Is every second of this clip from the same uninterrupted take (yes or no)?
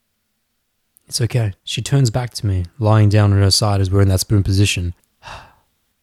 no